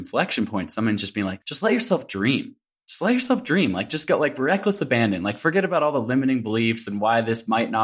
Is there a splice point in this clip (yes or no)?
yes